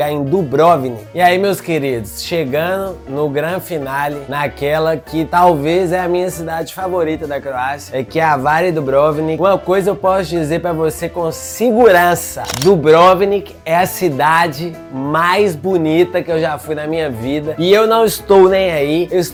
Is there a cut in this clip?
no; 0 cuts

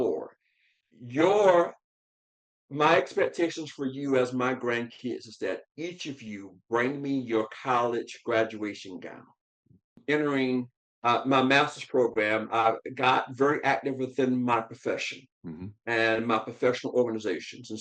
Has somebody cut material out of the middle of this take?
yes; 1 cut; at 10.0 s

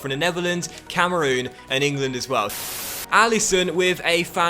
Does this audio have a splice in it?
yes; 1 cut; at 2.8 s

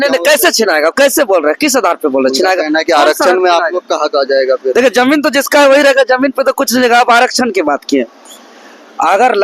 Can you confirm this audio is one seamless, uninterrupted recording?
yes; 0 cuts

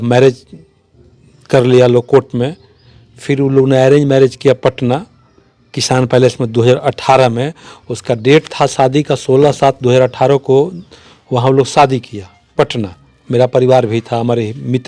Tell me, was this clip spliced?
no; 0 cuts

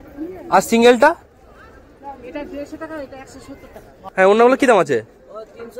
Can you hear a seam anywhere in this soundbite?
yes; 1 cut; at 4.1 s

